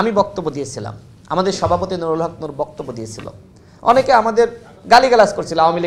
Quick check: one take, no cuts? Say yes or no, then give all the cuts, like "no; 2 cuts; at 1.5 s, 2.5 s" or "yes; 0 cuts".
yes; 0 cuts